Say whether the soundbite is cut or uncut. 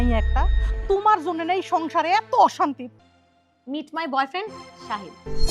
cut